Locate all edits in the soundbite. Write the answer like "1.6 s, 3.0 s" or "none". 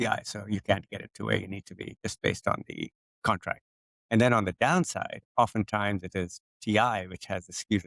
none